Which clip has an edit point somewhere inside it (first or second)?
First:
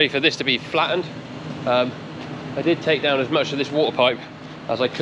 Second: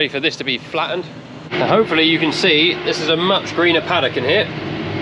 second